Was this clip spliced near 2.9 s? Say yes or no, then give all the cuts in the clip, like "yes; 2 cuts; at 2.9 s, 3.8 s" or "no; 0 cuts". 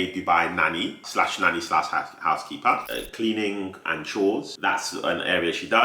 yes; 2 cuts; at 2.9 s, 4.5 s